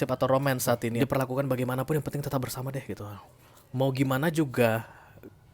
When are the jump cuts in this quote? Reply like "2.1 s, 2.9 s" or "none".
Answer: 0.9 s